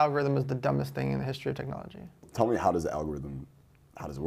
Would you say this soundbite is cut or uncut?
cut